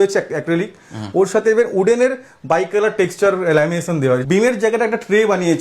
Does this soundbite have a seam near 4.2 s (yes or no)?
yes